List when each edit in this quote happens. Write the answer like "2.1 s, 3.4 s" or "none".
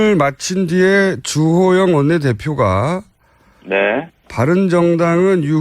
2.2 s